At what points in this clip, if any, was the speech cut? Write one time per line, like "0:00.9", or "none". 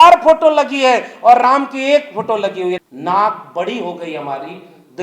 0:02.8